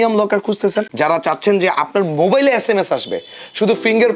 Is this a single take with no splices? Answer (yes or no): no